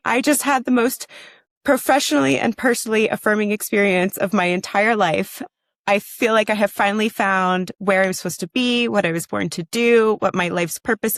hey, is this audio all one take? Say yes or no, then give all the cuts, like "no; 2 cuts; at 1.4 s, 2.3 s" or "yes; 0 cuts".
yes; 0 cuts